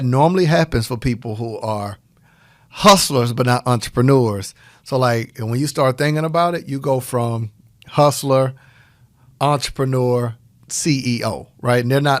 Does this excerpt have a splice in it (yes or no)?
no